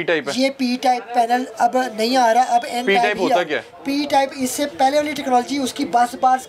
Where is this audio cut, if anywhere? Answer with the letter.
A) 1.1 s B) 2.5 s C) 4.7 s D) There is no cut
D